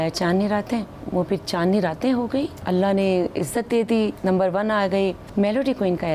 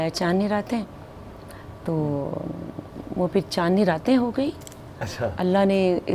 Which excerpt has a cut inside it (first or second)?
first